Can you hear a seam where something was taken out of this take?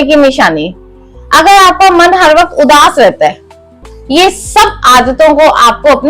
yes; 1 cut; at 3.9 s

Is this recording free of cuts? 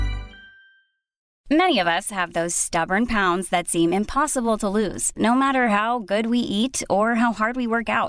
no; 1 cut; at 1.3 s

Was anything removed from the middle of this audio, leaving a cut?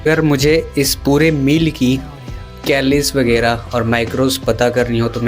no; 0 cuts

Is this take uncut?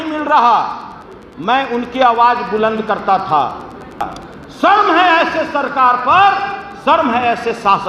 no; 1 cut; at 4.2 s

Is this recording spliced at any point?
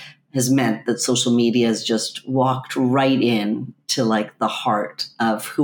no; 0 cuts

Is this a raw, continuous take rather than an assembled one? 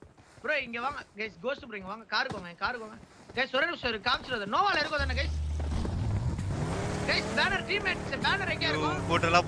yes; 0 cuts

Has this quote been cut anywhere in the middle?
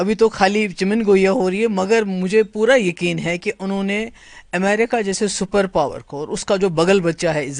no; 0 cuts

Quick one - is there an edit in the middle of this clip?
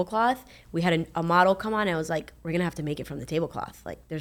no; 0 cuts

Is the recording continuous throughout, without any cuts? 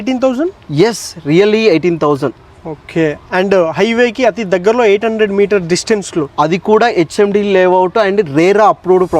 yes; 0 cuts

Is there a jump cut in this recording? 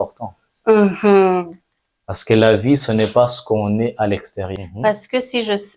yes; 1 cut; at 4.5 s

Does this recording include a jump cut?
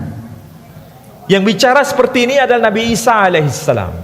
no; 0 cuts

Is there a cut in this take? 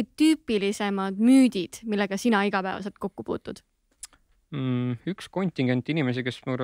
no; 0 cuts

